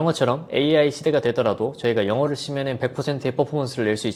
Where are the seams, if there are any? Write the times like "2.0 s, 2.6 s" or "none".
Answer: none

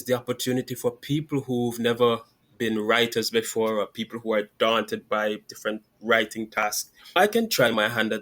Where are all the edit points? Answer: 7.2 s

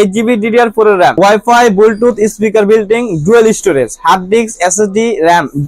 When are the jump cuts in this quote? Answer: 1.1 s

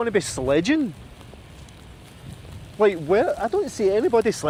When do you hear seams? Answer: none

